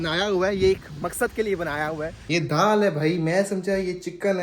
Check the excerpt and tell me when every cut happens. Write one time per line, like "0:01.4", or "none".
0:02.2